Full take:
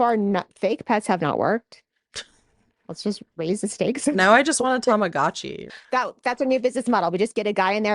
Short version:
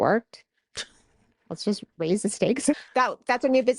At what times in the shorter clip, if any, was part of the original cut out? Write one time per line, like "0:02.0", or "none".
0:02.7